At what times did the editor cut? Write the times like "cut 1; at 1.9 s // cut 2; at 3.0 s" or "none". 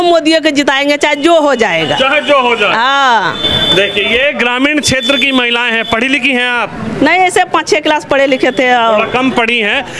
none